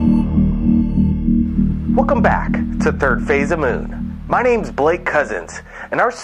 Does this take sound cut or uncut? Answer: uncut